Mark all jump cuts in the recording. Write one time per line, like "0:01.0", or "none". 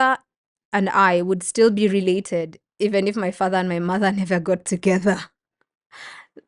none